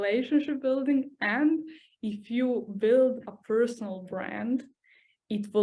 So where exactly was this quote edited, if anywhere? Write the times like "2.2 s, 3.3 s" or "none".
none